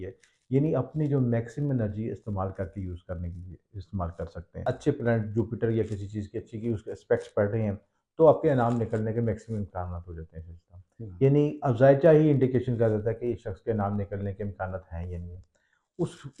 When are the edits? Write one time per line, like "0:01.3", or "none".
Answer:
0:04.5